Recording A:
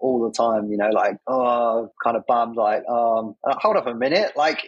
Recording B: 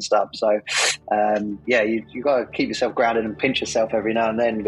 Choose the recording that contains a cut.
A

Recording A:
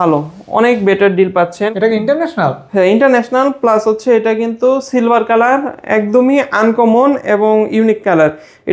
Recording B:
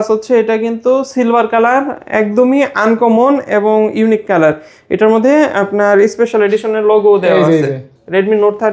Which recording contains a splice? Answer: A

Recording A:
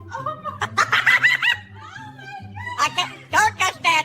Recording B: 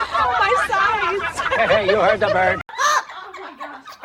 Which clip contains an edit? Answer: B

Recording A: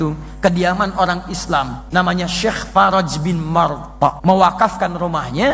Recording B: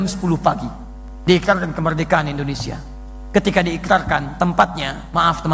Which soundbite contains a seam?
A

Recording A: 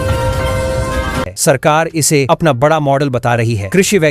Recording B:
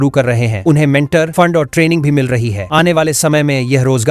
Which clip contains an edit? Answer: A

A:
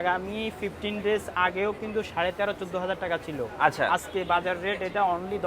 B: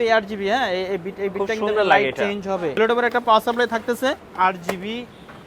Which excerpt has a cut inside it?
B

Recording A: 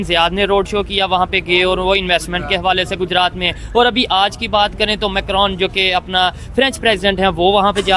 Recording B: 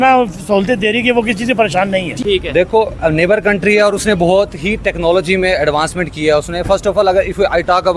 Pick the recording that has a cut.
B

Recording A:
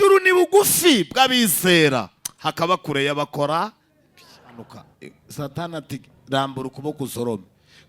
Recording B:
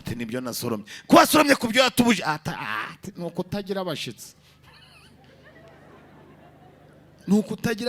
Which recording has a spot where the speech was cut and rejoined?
A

